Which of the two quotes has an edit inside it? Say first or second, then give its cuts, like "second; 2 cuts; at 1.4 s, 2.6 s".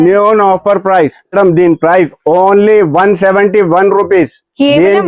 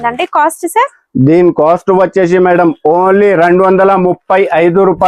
first; 1 cut; at 1.3 s